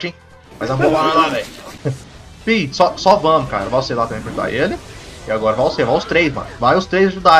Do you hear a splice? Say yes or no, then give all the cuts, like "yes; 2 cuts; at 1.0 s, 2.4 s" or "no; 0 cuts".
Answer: no; 0 cuts